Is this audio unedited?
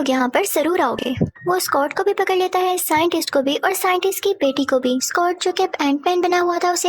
yes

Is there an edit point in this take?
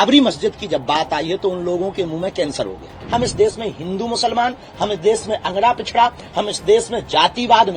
yes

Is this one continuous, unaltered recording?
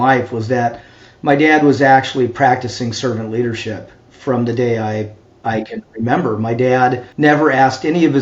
no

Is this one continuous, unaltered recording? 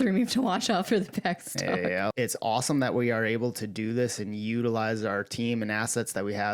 no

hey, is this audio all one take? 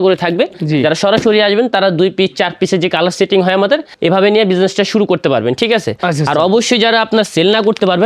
no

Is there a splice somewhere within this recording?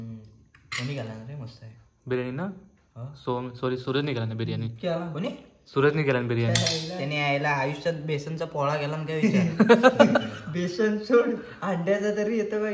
no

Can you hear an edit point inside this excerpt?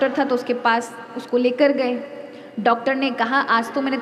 no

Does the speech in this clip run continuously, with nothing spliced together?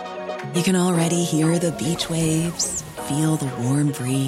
yes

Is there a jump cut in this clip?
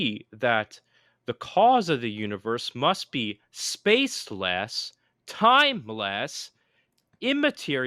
no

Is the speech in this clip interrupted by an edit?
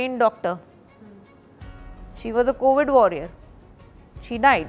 no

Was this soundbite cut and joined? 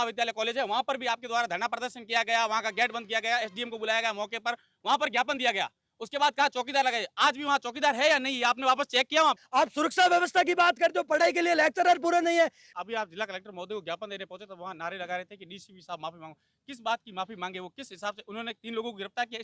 yes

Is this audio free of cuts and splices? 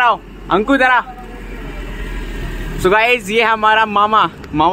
yes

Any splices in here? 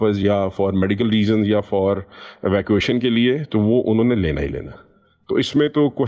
no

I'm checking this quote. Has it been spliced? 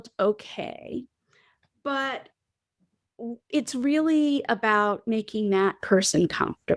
no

